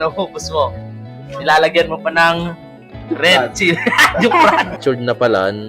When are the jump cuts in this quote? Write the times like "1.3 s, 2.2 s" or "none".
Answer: 4.8 s

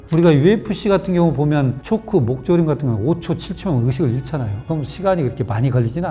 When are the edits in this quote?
4.6 s

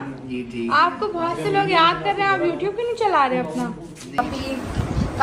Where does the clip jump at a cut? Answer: 3.9 s

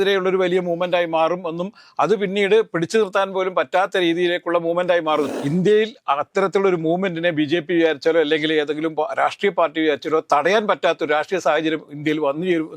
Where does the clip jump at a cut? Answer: 5.3 s

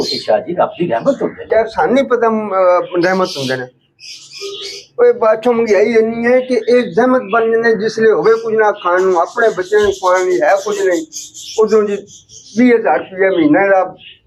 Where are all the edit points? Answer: none

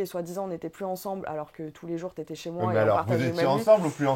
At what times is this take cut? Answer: none

